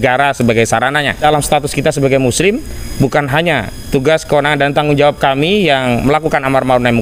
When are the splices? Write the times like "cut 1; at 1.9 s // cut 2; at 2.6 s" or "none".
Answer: cut 1; at 1.2 s

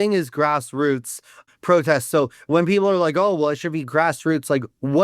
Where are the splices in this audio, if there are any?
cut 1; at 1.4 s

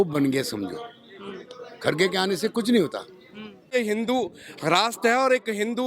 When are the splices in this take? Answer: cut 1; at 3.7 s

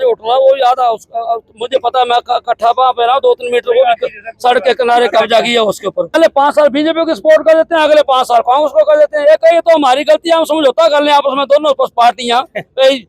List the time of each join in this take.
cut 1; at 6.2 s

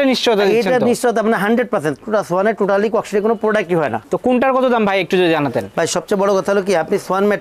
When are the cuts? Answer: none

